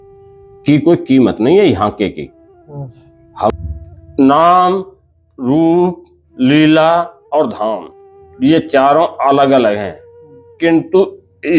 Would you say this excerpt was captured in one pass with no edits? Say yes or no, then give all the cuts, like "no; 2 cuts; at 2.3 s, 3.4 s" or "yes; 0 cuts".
no; 1 cut; at 3.5 s